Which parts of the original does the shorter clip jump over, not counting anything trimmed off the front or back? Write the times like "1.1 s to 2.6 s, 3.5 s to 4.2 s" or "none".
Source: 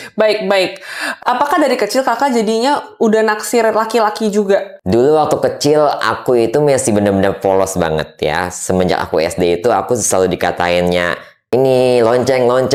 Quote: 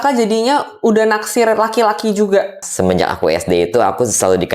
4.8 s to 8.5 s